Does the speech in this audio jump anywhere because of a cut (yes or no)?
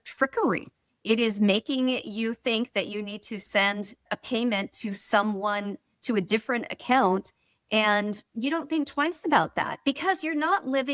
no